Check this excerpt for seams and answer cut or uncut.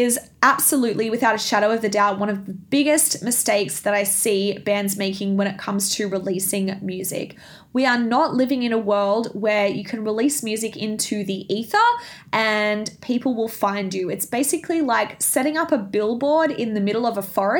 uncut